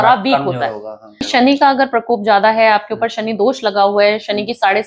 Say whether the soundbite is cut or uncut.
cut